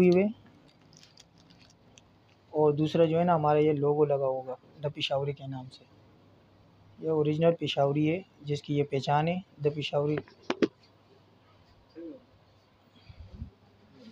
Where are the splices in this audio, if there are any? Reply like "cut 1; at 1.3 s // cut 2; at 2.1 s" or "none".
none